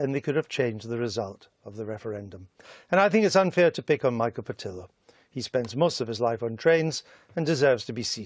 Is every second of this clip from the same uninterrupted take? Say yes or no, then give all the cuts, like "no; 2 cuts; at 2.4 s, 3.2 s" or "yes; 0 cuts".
yes; 0 cuts